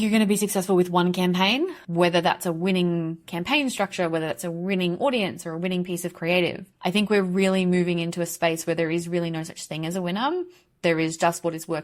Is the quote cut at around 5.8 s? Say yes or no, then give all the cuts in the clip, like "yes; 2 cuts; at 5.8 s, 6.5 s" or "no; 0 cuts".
no; 1 cut; at 1.8 s